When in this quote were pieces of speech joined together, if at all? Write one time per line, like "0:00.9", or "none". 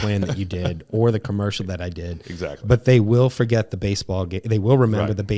none